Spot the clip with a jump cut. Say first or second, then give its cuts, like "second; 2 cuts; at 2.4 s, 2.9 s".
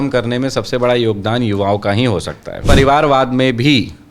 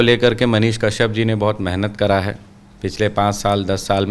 first; 1 cut; at 2.7 s